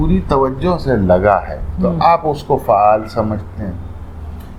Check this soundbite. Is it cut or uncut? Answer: uncut